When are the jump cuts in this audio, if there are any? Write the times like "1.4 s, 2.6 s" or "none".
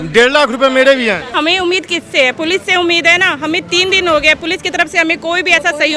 1.3 s